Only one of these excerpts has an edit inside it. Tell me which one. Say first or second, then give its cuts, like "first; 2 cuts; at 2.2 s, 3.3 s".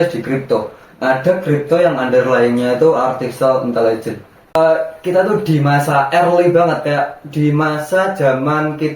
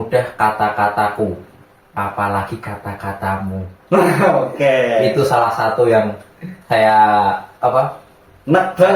first; 1 cut; at 4.5 s